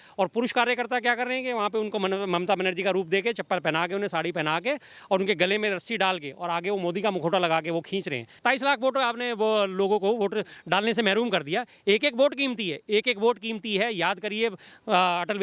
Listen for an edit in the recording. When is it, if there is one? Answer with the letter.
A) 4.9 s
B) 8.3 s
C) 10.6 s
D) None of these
B